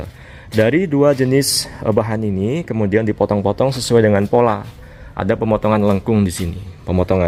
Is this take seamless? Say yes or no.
yes